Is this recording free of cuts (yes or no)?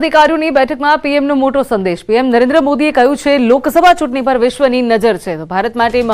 yes